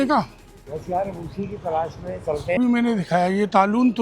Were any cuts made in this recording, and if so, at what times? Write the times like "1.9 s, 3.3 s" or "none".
2.6 s